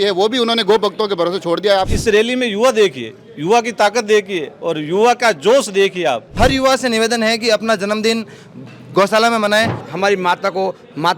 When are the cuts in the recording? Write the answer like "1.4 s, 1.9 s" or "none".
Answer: 1.9 s, 6.4 s, 9.9 s